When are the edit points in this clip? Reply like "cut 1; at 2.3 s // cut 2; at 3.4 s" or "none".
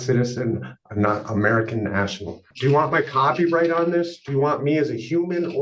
cut 1; at 2.5 s